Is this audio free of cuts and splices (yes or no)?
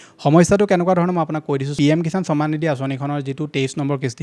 no